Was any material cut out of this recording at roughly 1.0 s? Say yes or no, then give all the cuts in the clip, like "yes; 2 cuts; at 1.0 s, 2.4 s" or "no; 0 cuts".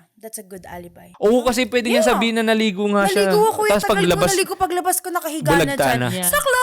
yes; 1 cut; at 1.0 s